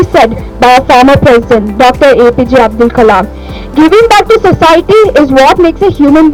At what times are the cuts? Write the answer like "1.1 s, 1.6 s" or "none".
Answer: none